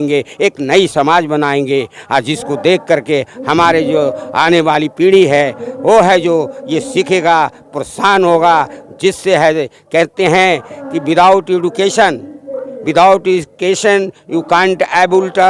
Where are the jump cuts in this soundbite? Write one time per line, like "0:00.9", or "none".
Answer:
none